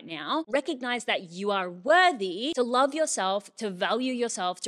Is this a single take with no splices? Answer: no; 1 cut; at 2.5 s

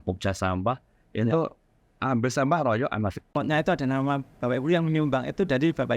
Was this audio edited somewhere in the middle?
yes; 1 cut; at 3.3 s

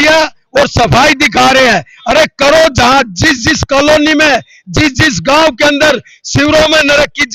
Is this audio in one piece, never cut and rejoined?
yes; 0 cuts

